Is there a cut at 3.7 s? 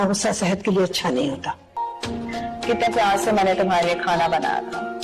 no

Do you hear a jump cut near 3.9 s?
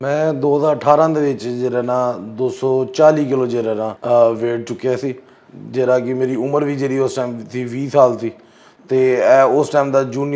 yes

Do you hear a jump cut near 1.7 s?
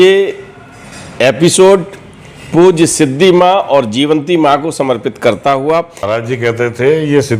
no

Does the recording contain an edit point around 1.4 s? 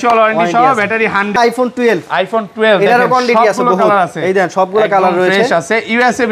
yes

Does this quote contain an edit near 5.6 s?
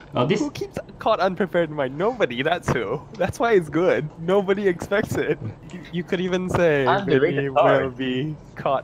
yes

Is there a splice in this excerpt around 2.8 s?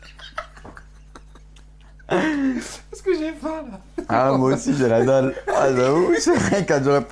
no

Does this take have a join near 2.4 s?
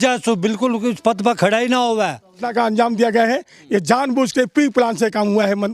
yes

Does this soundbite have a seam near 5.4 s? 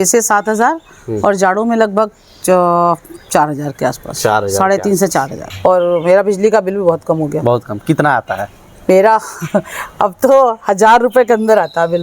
yes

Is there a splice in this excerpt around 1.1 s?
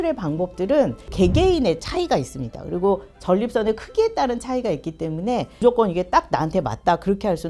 yes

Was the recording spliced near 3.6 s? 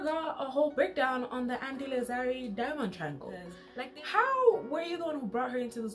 yes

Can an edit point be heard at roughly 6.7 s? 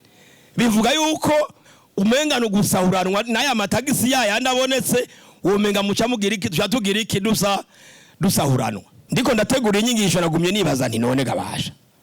no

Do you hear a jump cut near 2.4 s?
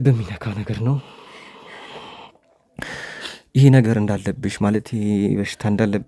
no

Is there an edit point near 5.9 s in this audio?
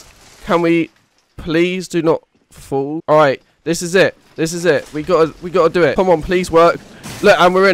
yes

